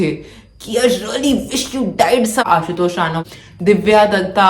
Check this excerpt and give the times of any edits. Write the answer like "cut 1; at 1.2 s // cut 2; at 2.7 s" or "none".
cut 1; at 2.4 s // cut 2; at 3.2 s